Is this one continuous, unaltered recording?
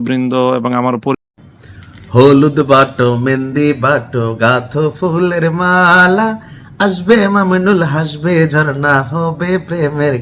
no; 1 cut; at 1.2 s

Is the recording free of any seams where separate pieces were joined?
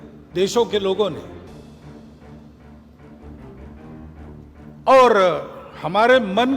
no; 3 cuts; at 1.2 s, 3.7 s, 4.7 s

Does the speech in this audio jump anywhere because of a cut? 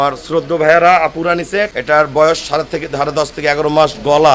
yes; 1 cut; at 1.7 s

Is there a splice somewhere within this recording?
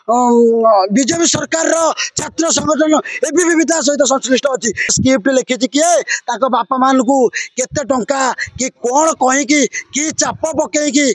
yes; 1 cut; at 4.9 s

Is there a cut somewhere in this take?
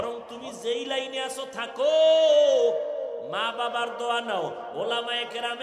no; 0 cuts

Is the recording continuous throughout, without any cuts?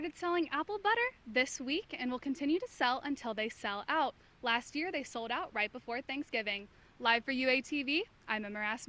yes; 0 cuts

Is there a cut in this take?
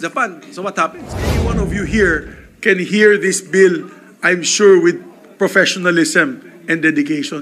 yes; 1 cut; at 1.5 s

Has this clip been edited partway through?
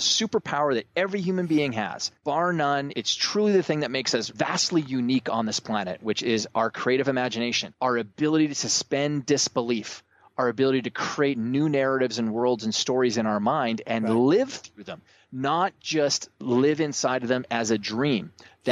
yes; 4 cuts; at 2.0 s, 2.9 s, 4.3 s, 7.6 s

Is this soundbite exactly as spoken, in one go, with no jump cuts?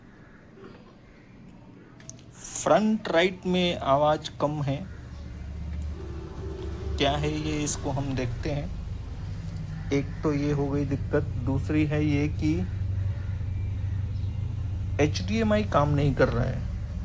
yes; 0 cuts

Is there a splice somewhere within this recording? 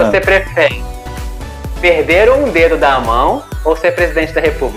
no; 0 cuts

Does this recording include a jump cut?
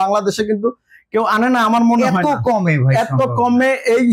no; 0 cuts

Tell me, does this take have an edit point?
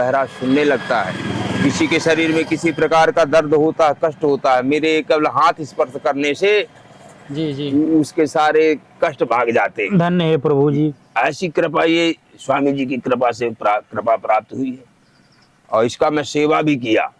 no; 0 cuts

